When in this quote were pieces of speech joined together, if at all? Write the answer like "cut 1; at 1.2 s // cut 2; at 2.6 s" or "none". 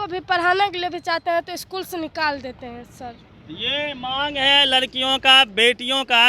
none